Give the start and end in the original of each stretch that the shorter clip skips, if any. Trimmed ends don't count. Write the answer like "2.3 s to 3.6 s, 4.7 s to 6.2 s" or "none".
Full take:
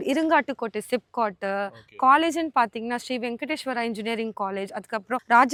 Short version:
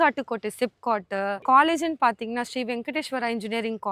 1.7 s to 1.9 s